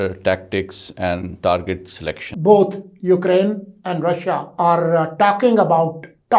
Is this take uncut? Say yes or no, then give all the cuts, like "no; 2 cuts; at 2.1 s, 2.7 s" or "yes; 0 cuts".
no; 2 cuts; at 2.3 s, 4.5 s